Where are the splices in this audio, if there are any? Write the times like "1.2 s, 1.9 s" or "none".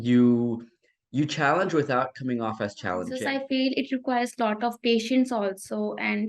3.2 s